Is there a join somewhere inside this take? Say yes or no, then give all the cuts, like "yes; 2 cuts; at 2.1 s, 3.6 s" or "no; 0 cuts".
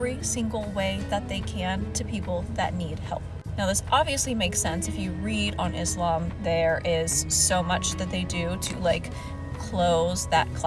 no; 0 cuts